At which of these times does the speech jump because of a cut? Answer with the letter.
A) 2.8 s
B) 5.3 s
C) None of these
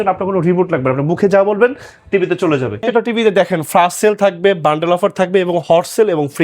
A